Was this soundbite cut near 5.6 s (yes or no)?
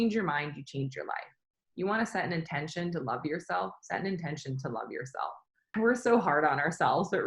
yes